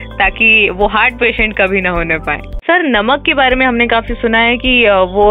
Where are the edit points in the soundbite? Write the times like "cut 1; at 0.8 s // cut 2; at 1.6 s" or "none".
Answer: cut 1; at 2.5 s